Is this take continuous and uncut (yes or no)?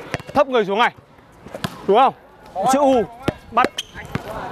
yes